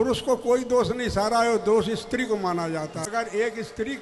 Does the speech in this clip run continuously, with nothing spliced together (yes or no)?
no